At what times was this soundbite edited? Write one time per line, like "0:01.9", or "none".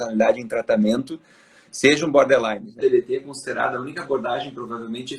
0:02.8